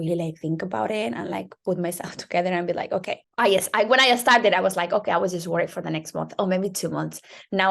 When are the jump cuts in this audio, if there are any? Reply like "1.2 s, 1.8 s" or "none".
3.2 s